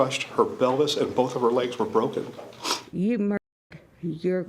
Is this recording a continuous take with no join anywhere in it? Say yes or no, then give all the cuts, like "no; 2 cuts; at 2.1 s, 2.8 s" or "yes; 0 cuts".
no; 1 cut; at 2.8 s